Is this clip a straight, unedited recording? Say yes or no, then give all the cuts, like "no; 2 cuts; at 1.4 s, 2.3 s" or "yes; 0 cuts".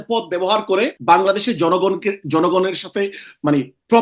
no; 1 cut; at 1.0 s